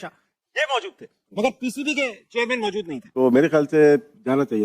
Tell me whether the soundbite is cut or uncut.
cut